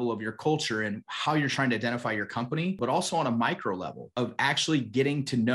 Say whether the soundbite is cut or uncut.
cut